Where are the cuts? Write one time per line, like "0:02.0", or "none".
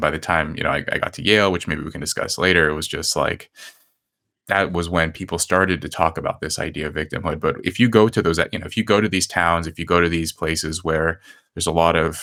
none